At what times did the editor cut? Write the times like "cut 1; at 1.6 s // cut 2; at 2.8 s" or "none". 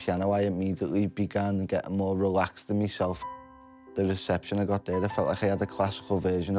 cut 1; at 3.6 s

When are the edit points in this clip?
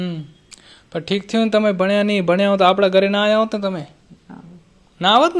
none

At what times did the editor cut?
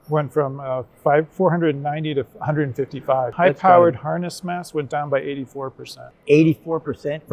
cut 1; at 3.3 s

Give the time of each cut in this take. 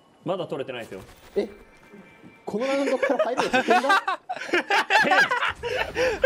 none

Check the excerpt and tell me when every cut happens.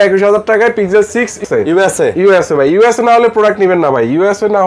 cut 1; at 1.4 s

